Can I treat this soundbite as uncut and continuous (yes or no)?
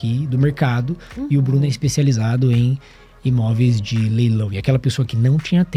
yes